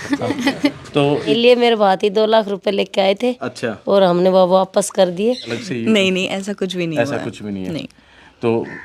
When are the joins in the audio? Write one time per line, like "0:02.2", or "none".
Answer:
0:01.3
0:05.5